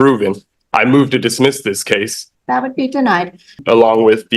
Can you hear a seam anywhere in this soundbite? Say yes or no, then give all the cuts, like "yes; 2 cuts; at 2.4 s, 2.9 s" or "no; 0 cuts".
yes; 2 cuts; at 2.2 s, 3.6 s